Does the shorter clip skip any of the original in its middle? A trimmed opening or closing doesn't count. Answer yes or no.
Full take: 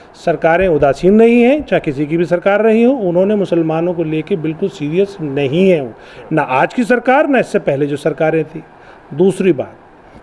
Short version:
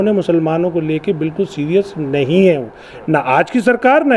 no